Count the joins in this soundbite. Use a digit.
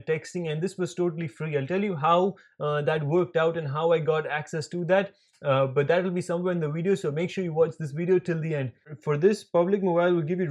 1